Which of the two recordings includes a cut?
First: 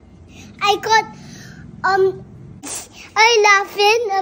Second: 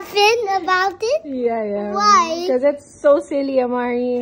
first; 1 cut; at 2.5 s

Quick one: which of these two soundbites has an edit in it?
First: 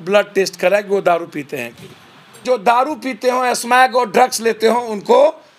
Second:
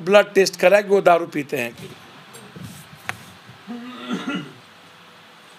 first; 1 cut; at 2.4 s

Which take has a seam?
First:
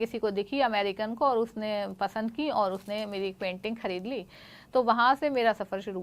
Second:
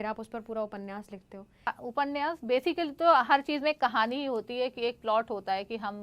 second; 1 cut; at 1.7 s

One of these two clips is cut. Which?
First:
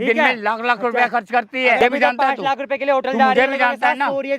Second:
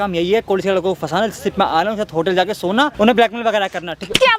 first; 1 cut; at 1.8 s

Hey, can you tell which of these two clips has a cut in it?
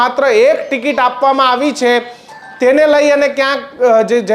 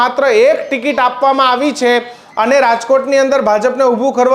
second; 1 cut; at 2.2 s

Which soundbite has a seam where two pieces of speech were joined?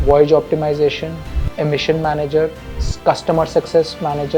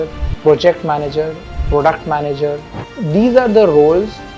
first; 1 cut; at 2.8 s

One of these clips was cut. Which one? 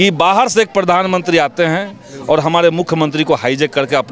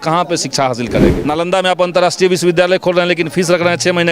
second; 1 cut; at 1.2 s

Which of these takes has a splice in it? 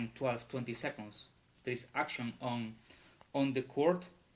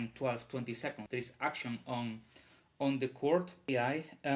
second; 2 cuts; at 1.0 s, 3.7 s

